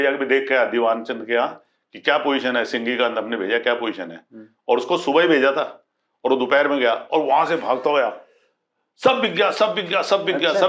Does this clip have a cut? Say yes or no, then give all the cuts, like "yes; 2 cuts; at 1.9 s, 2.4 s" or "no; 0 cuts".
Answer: no; 0 cuts